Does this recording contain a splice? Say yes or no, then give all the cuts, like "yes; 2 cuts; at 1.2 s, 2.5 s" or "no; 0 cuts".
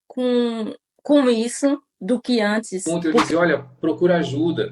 yes; 1 cut; at 2.9 s